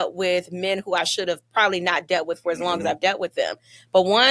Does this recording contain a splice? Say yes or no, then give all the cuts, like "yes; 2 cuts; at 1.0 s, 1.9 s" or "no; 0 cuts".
no; 0 cuts